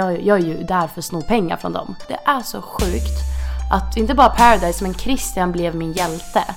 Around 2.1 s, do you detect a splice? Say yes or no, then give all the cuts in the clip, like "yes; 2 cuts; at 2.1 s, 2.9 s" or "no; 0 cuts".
yes; 1 cut; at 2.1 s